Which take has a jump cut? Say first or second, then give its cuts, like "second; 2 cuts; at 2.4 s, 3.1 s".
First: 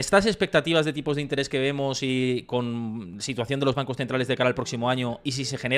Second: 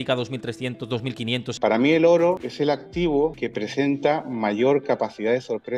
second; 3 cuts; at 1.5 s, 2.5 s, 3.4 s